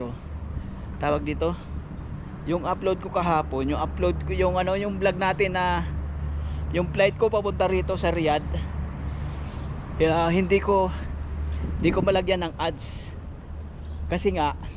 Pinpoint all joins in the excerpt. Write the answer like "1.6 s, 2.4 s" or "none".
none